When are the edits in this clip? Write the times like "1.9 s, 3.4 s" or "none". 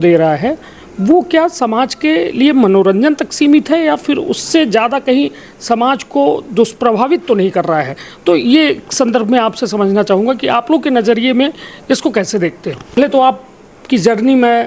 13.0 s